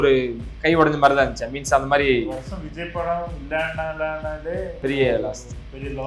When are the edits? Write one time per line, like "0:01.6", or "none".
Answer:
0:04.7